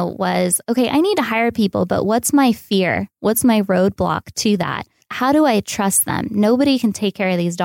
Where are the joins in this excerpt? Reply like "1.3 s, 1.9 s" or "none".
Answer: 5.1 s